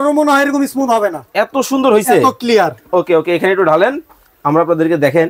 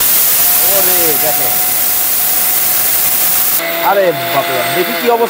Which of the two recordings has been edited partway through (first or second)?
second